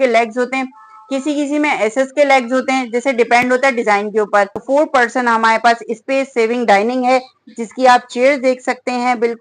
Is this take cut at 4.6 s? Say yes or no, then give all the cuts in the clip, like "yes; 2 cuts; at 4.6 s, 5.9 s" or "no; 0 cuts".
yes; 1 cut; at 4.6 s